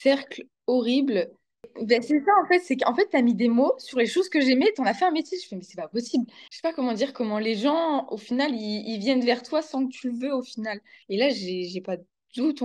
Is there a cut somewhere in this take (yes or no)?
yes